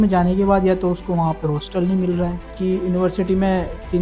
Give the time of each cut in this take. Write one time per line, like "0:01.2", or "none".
0:02.4